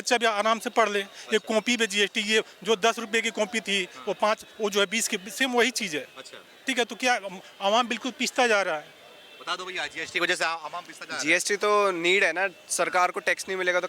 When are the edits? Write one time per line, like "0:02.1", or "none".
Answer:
none